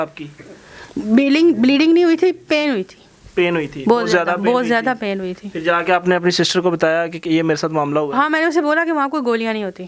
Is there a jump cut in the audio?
no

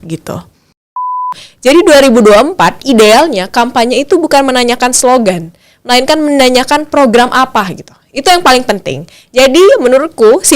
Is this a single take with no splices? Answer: no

